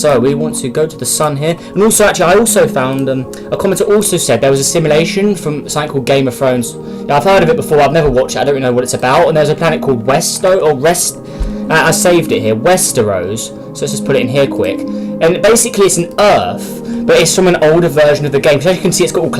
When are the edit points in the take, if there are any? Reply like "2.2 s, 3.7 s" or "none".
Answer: 12.0 s